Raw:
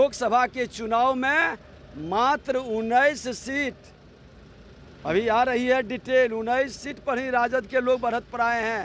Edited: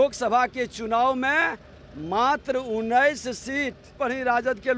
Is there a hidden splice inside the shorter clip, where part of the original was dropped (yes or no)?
yes